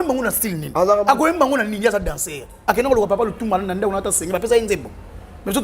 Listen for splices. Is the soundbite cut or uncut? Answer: cut